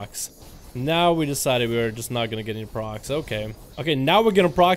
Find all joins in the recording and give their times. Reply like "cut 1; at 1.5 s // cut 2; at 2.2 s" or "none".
cut 1; at 3.6 s